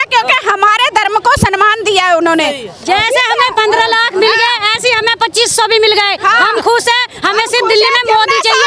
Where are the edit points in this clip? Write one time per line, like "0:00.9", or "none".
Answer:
none